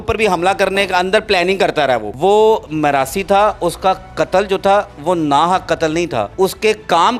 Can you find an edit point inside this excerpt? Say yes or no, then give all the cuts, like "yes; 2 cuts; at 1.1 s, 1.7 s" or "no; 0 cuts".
yes; 2 cuts; at 2.1 s, 6.3 s